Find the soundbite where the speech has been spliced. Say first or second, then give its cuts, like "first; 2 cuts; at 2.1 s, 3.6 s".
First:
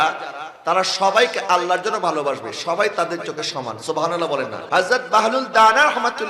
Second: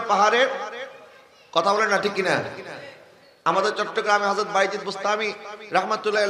first; 1 cut; at 4.6 s